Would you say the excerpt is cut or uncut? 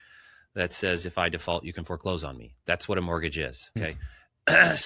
cut